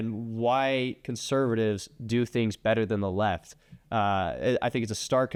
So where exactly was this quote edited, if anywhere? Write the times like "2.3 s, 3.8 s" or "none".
none